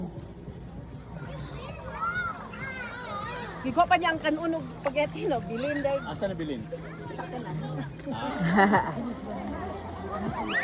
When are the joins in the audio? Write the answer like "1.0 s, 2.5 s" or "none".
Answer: 8.3 s